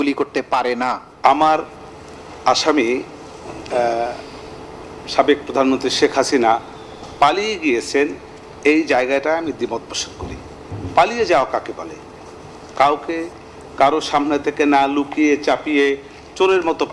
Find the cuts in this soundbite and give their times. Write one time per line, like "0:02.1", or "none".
0:01.1